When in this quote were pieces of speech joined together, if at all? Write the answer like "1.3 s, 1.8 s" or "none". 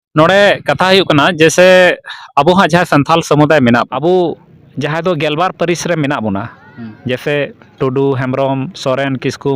3.9 s